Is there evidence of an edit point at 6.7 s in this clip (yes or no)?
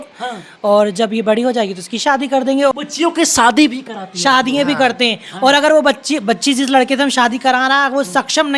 no